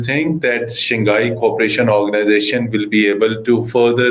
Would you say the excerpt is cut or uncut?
uncut